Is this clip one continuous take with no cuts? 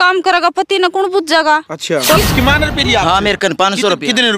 no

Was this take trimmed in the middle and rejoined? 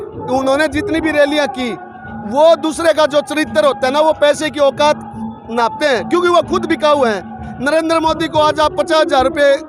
no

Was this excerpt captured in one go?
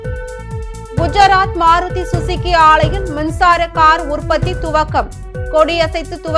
no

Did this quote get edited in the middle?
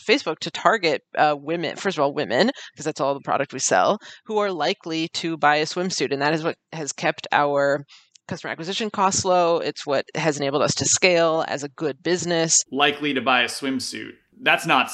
yes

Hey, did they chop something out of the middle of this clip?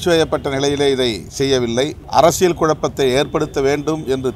yes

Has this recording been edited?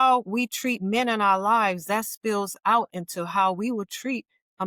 no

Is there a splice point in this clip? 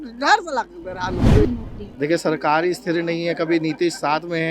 yes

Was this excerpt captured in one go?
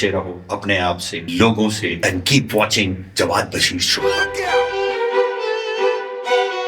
no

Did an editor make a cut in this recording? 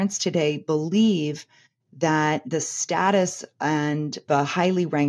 no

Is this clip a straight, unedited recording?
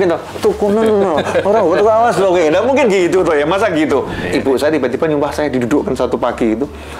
no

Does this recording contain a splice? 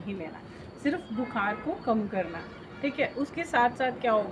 no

